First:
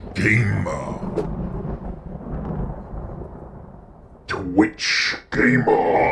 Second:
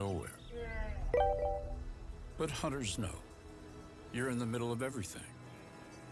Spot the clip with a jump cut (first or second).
first